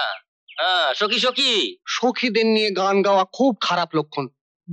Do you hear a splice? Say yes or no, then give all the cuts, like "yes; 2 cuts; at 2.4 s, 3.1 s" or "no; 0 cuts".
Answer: yes; 1 cut; at 1.8 s